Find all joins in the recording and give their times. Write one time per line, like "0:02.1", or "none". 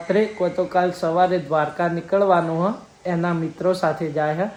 none